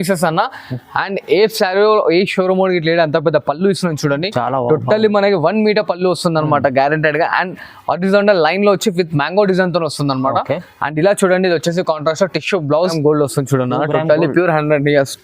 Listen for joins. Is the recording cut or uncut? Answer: cut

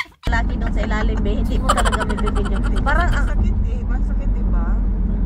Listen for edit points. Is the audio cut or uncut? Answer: uncut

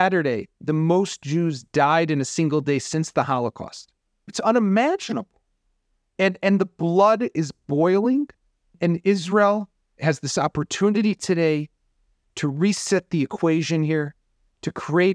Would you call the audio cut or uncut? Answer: cut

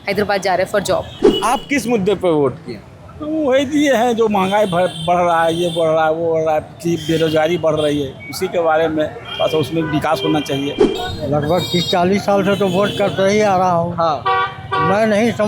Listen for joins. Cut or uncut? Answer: cut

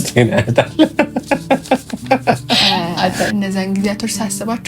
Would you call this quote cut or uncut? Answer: cut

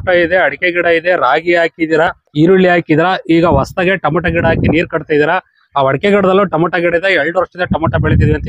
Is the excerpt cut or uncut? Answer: uncut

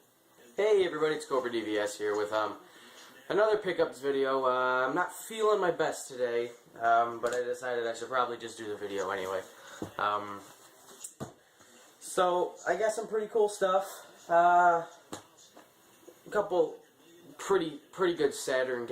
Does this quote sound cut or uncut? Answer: cut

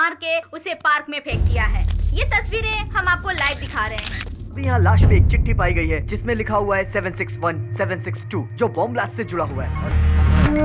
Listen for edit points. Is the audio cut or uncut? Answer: cut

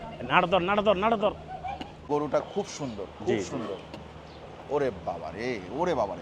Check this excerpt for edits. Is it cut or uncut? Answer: cut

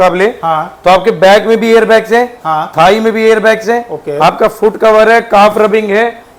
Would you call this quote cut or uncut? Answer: uncut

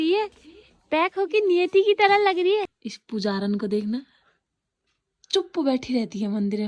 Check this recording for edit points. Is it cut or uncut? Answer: cut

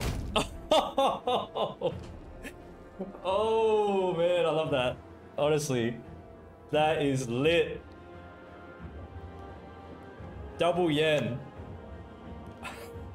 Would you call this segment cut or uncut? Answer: uncut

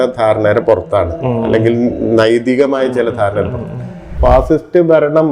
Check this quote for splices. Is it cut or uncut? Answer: cut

